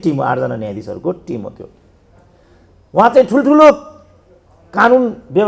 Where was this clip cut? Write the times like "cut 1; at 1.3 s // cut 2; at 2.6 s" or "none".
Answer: none